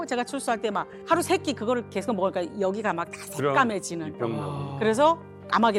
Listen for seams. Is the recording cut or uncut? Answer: uncut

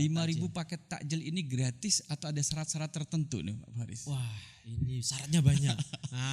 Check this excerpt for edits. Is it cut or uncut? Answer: uncut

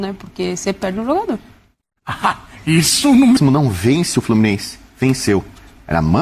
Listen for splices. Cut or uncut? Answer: cut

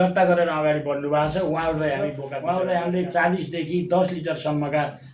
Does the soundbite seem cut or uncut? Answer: cut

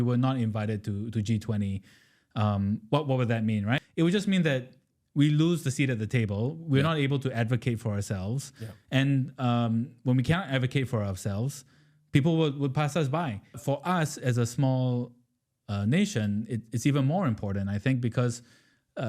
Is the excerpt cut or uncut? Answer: cut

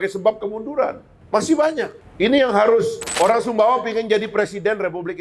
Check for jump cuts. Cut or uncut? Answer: cut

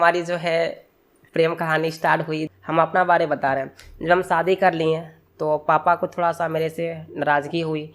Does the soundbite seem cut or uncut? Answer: cut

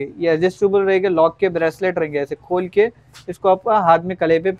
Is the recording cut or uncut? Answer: uncut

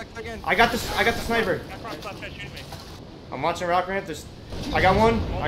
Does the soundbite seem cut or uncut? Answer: cut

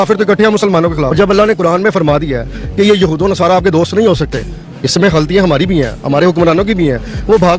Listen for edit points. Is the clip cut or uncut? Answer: uncut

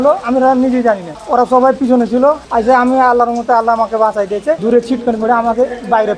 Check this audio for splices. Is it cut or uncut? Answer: cut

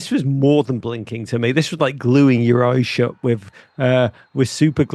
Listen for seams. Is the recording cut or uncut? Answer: uncut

